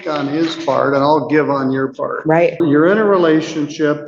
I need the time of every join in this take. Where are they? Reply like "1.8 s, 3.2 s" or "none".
2.6 s